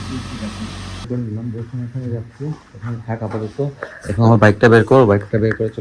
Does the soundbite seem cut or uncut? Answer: cut